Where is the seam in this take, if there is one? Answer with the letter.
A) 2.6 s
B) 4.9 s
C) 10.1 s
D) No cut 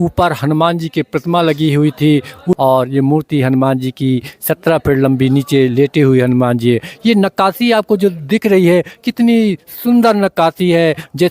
A